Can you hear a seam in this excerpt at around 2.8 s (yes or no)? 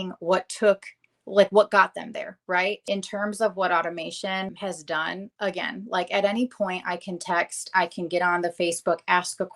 yes